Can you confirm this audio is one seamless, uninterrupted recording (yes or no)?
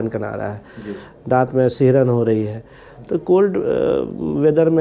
yes